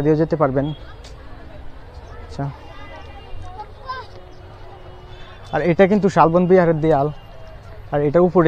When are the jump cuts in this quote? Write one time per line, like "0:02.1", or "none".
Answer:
none